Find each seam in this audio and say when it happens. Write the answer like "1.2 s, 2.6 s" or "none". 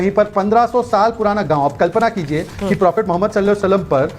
none